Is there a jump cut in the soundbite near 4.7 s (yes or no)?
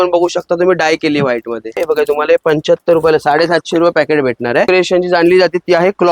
yes